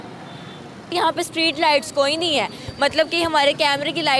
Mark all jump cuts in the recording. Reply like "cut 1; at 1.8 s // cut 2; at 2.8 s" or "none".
cut 1; at 0.9 s